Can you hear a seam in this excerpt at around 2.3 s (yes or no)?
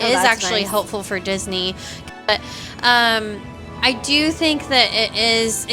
yes